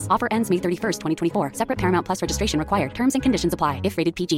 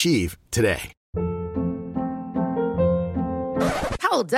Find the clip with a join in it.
second; 1 cut; at 1.0 s

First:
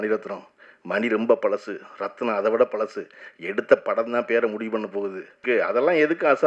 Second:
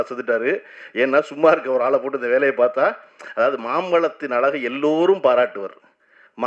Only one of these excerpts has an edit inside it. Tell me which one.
first; 1 cut; at 5.4 s

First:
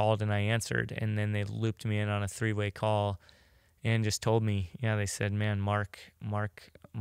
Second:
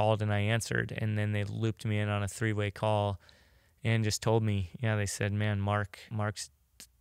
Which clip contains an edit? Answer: second; 1 cut; at 6.0 s

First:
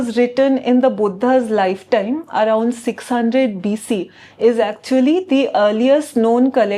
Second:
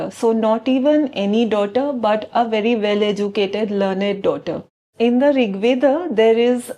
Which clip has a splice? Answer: second; 1 cut; at 4.9 s

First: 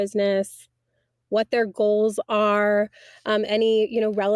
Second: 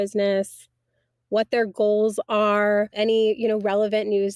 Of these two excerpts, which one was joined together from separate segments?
second; 1 cut; at 2.9 s

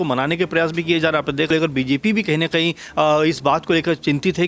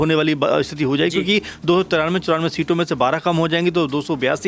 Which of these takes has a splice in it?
first; 1 cut; at 1.5 s

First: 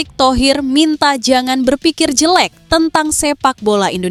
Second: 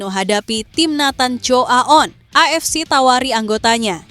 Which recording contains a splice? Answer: second; 1 cut; at 2.2 s

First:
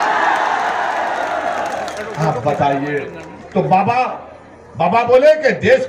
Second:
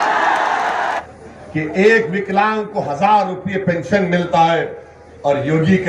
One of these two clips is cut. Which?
second; 1 cut; at 1.0 s

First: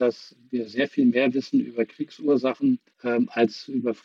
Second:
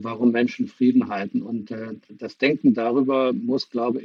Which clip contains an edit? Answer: first; 1 cut; at 2.9 s

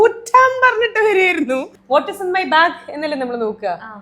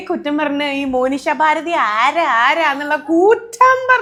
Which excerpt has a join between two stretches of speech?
first; 1 cut; at 1.7 s

